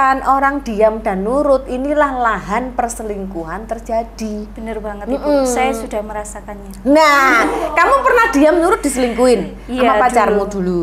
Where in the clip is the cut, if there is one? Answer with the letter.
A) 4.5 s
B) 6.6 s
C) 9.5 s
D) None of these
D